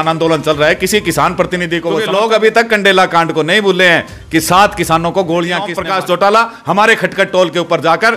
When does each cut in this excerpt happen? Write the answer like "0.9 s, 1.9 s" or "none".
1.9 s, 5.8 s